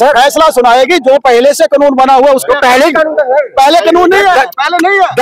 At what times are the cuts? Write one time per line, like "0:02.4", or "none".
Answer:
none